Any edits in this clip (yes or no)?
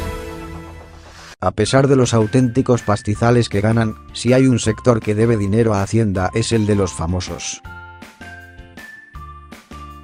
no